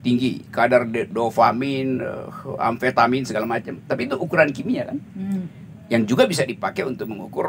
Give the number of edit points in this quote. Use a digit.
0